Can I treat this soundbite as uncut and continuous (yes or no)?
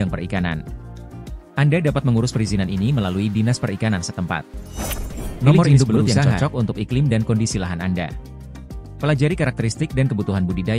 no